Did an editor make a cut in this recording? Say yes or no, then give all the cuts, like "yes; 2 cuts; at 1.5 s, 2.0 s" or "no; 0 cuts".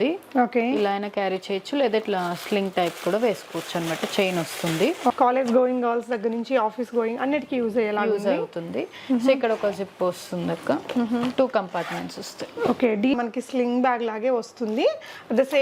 yes; 2 cuts; at 5.1 s, 13.1 s